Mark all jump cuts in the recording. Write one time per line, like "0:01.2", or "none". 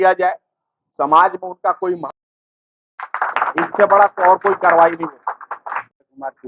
none